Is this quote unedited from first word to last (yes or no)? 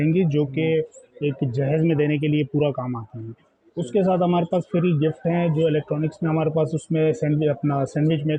yes